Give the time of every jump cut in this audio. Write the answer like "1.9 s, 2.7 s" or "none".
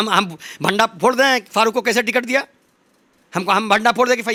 none